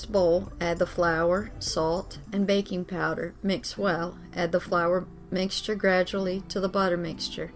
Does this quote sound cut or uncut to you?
uncut